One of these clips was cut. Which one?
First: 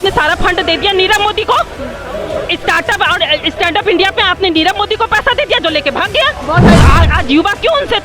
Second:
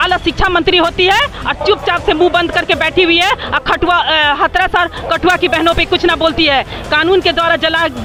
first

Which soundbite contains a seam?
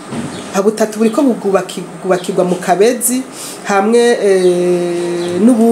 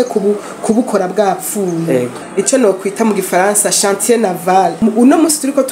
second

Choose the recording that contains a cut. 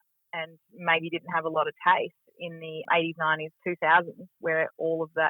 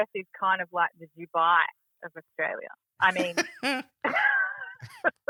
first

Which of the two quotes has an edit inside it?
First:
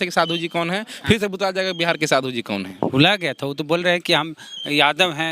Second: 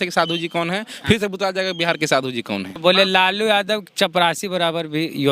second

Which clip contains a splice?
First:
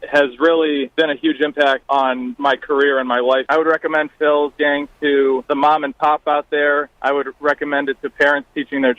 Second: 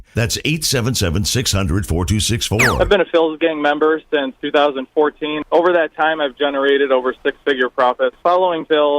second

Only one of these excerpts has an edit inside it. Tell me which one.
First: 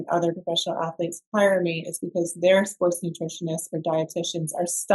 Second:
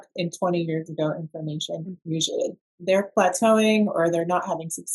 second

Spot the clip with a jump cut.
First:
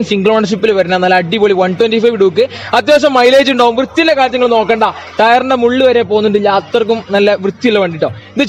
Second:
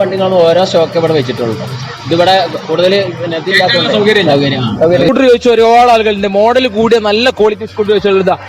second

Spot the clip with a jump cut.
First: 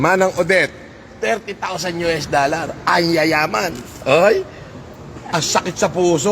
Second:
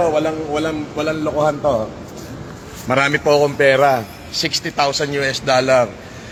first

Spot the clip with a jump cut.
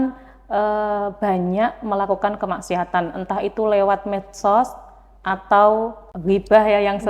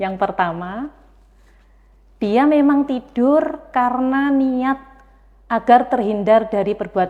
first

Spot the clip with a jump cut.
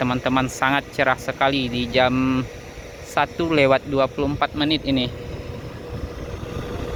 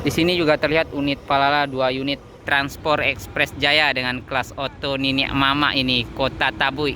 second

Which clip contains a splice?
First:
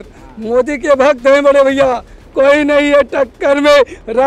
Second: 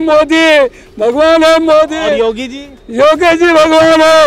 first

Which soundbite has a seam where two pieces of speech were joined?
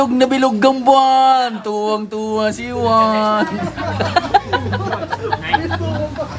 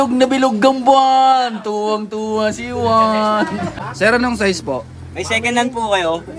second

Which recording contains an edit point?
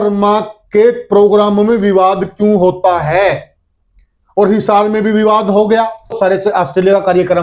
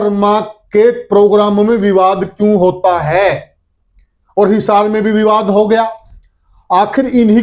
first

